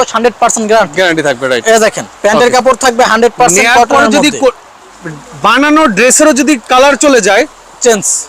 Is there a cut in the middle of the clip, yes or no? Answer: no